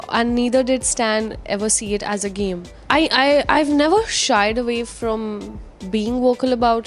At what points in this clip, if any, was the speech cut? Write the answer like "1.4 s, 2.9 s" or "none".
2.7 s